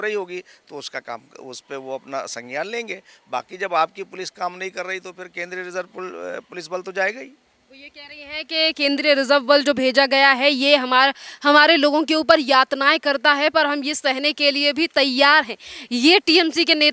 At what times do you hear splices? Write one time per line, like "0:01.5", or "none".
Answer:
none